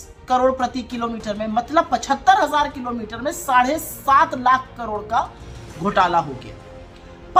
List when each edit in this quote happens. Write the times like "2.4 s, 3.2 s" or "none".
none